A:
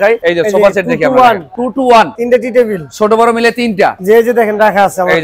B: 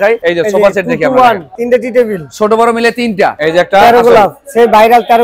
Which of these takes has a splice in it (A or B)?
B